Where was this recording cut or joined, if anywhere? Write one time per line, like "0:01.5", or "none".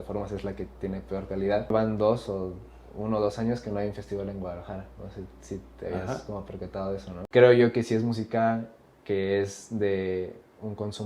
0:01.7
0:07.1